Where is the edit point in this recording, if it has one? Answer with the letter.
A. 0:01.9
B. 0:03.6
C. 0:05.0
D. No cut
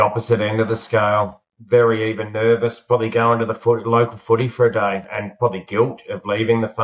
C